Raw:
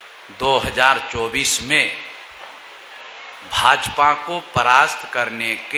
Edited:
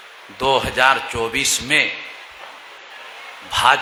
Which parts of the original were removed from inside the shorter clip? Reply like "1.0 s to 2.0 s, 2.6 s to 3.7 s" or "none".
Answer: none